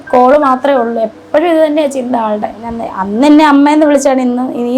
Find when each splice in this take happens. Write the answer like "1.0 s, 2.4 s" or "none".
2.8 s